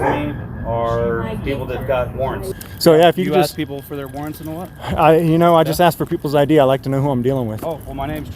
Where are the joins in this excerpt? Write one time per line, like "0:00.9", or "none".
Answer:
0:02.6